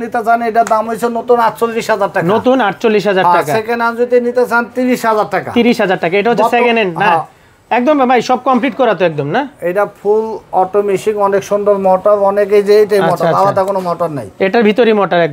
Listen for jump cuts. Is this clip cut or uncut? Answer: uncut